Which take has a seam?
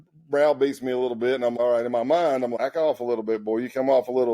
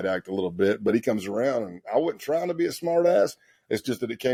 first; 2 cuts; at 1.5 s, 2.5 s

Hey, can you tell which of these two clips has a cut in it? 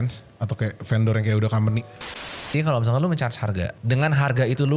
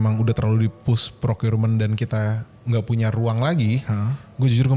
first; 2 cuts; at 2.4 s, 3.8 s

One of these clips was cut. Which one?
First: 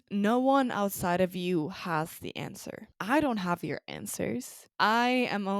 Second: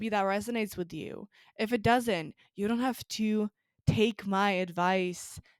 first; 2 cuts; at 2.9 s, 4.6 s

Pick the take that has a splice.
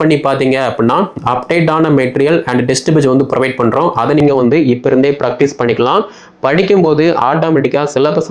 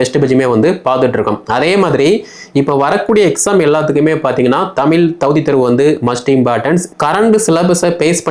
second; 1 cut; at 6.9 s

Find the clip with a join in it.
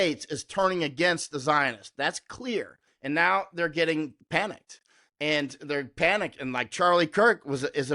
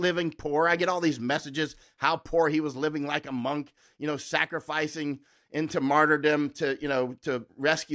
first; 2 cuts; at 2.8 s, 4.2 s

